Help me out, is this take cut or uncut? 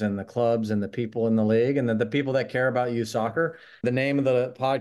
cut